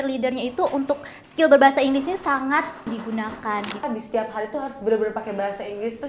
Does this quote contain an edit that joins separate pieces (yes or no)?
yes